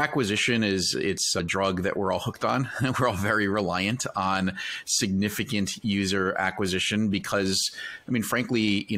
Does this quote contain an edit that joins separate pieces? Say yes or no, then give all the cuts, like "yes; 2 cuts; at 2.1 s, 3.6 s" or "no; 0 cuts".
yes; 1 cut; at 1.4 s